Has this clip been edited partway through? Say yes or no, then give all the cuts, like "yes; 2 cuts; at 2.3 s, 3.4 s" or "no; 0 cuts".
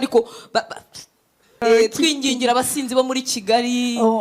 yes; 1 cut; at 1.6 s